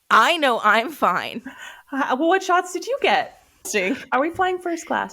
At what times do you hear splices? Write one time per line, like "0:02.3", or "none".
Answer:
0:03.7